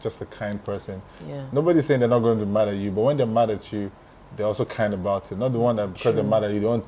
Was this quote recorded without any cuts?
yes; 0 cuts

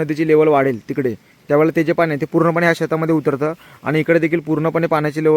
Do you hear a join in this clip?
no; 0 cuts

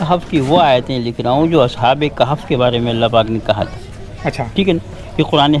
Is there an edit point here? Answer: no; 0 cuts

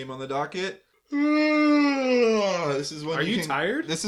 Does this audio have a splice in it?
yes; 1 cut; at 0.9 s

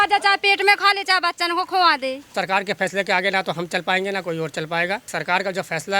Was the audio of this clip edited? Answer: yes; 2 cuts; at 2.2 s, 5.1 s

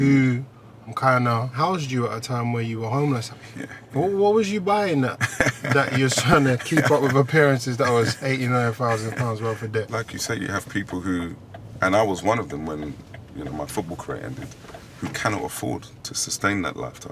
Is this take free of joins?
no; 3 cuts; at 1.6 s, 3.2 s, 9.9 s

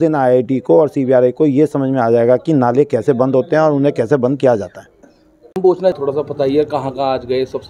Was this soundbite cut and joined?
no; 0 cuts

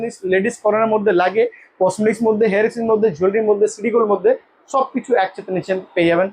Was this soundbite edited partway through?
no; 0 cuts

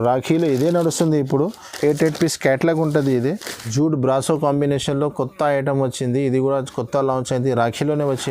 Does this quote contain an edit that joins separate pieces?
yes; 1 cut; at 3.7 s

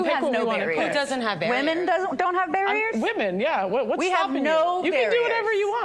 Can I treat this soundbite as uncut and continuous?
yes; 0 cuts

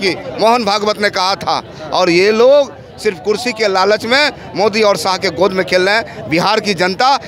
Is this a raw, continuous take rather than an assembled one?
yes; 0 cuts

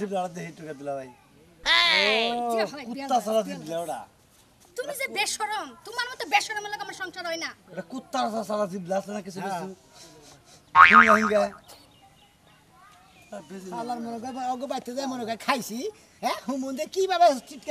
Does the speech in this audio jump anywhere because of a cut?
no; 0 cuts

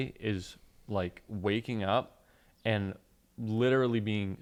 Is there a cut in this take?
no; 0 cuts

